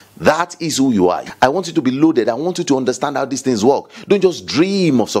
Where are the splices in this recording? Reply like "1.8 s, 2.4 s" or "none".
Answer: 1.2 s